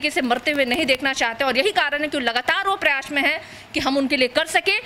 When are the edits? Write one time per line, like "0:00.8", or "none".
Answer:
none